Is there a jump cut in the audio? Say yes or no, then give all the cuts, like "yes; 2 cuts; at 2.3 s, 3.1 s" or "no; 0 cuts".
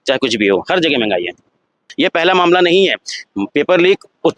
yes; 1 cut; at 1.9 s